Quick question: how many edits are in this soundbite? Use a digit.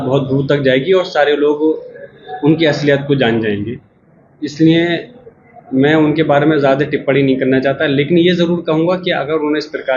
0